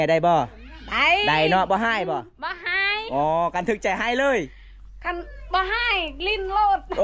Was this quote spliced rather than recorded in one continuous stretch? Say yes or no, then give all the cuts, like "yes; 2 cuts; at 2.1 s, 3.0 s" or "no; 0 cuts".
no; 0 cuts